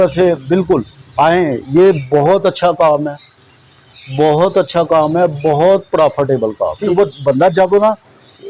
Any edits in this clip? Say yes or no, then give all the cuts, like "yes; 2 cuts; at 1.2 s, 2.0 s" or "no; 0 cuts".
yes; 1 cut; at 6.9 s